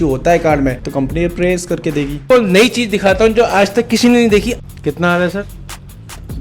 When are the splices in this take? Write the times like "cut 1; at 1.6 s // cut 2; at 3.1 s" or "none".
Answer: cut 1; at 0.8 s // cut 2; at 2.2 s // cut 3; at 4.6 s